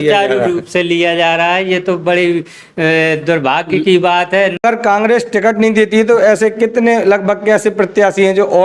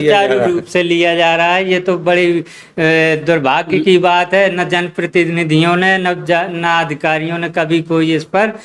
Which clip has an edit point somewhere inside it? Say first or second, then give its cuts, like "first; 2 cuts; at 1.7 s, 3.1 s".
first; 1 cut; at 4.6 s